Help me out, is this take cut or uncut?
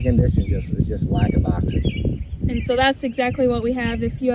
uncut